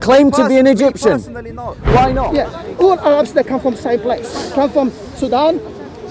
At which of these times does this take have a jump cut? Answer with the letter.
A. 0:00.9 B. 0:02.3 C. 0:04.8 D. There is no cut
B